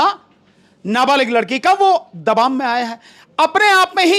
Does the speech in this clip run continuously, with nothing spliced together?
yes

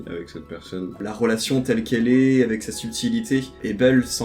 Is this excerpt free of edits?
no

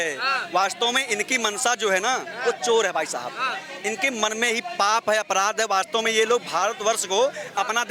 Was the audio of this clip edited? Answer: no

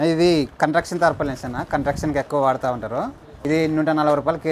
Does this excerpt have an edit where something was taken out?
no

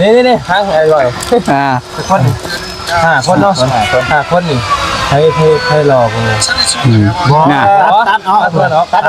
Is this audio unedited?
yes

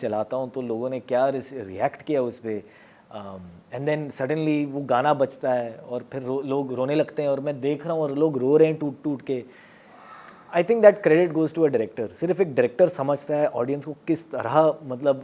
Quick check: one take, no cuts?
yes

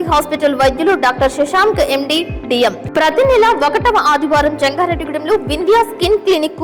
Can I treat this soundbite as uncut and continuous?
no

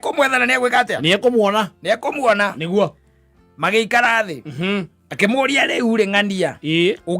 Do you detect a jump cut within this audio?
yes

